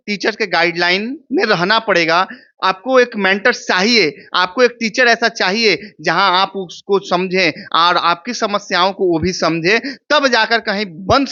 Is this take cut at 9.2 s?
no; 0 cuts

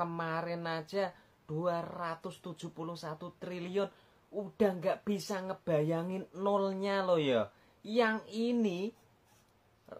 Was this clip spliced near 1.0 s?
no; 0 cuts

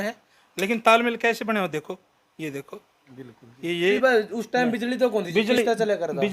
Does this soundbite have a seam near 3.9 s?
yes; 1 cut; at 3.9 s

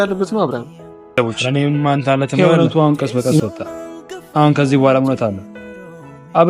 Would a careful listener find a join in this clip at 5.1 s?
no; 1 cut; at 2.4 s

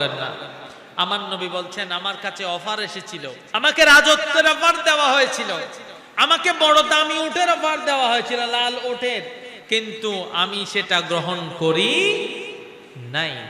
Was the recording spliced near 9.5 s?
no; 1 cut; at 3.4 s

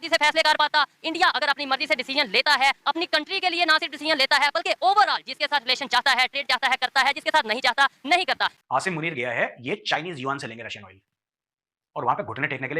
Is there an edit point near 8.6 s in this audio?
yes; 1 cut; at 8.6 s

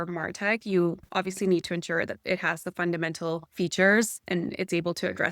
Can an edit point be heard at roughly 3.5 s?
yes; 2 cuts; at 3.5 s, 4.2 s

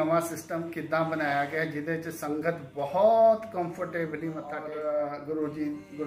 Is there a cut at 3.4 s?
no; 1 cut; at 4.6 s

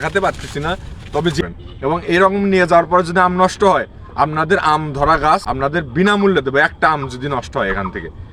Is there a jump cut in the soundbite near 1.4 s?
yes; 2 cuts; at 1.4 s, 5.5 s

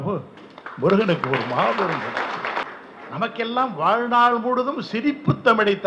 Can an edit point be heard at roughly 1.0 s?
no; 1 cut; at 2.7 s

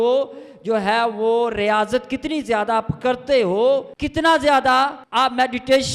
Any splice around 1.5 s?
no; 2 cuts; at 4.0 s, 5.0 s

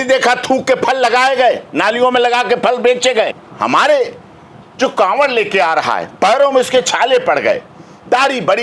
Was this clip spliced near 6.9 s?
no; 1 cut; at 3.3 s

